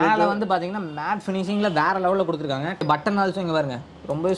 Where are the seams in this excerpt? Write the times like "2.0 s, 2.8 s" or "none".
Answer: 2.9 s